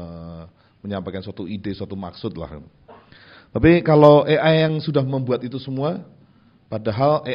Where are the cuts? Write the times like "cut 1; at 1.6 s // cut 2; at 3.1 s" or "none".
none